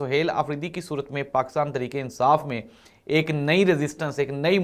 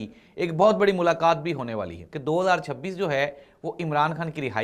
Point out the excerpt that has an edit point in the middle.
second; 1 cut; at 2.1 s

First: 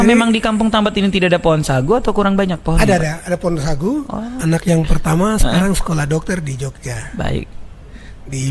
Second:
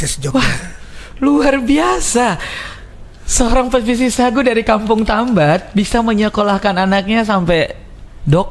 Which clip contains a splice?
first; 1 cut; at 4.3 s

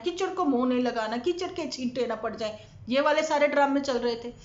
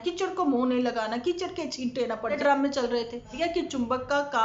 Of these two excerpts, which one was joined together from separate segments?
second; 2 cuts; at 2.4 s, 3.3 s

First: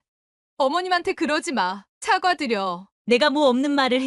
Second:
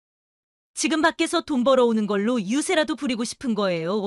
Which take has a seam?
first; 1 cut; at 2.9 s

